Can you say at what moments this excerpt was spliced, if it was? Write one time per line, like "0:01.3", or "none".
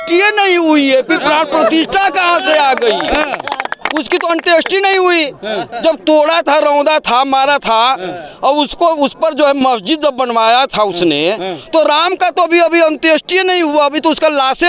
none

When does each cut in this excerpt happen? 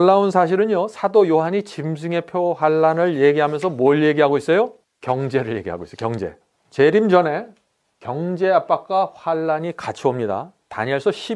0:04.9
0:06.6

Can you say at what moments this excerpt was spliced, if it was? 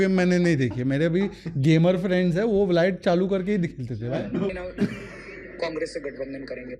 0:04.5

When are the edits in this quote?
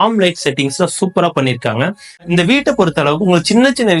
0:02.2

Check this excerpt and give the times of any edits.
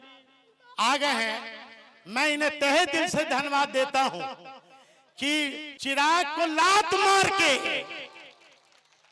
0:05.7

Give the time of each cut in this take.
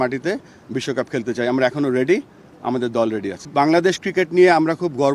0:03.4

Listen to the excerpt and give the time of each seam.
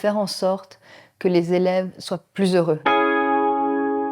0:02.8

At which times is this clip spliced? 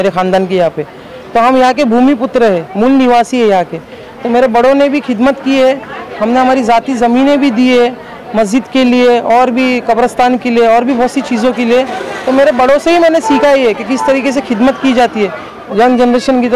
0:15.5

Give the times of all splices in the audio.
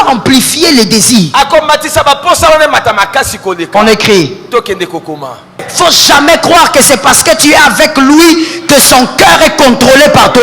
0:05.7

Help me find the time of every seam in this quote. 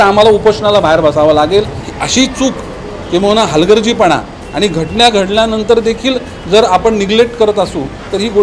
0:01.8

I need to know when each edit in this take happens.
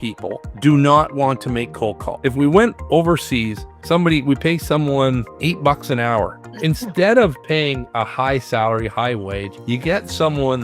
0:02.1
0:06.4

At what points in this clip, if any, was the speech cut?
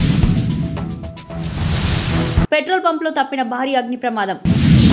none

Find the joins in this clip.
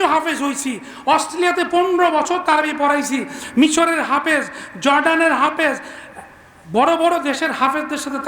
none

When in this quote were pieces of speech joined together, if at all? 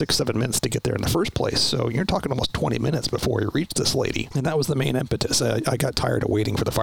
0:04.3

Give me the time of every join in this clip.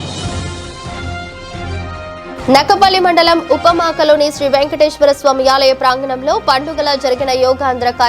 0:01.0

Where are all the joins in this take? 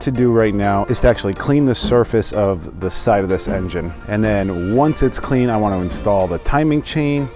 none

